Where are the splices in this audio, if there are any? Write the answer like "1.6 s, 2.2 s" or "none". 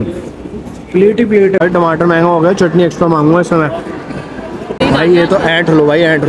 1.6 s, 4.8 s